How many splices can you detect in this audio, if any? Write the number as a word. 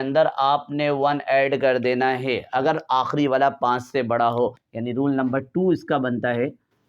one